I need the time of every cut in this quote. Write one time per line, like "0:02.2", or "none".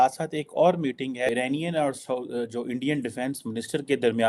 0:01.3